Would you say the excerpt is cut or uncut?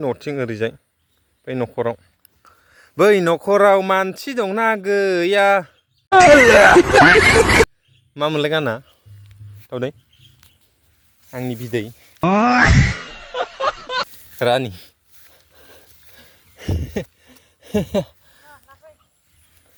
uncut